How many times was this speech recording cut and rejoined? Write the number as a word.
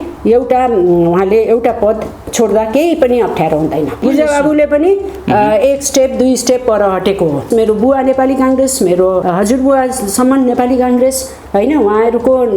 three